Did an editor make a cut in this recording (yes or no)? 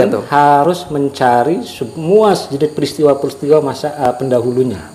no